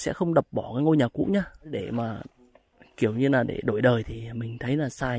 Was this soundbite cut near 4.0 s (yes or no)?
no